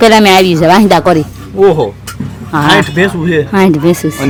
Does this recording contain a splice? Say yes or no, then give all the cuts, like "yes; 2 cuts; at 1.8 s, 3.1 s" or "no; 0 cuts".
no; 0 cuts